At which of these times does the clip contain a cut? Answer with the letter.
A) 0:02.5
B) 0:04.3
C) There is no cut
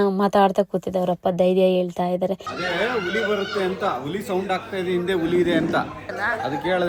C